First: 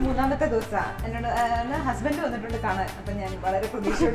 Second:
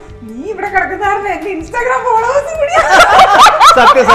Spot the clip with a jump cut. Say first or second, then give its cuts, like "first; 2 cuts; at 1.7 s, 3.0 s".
first; 1 cut; at 1.1 s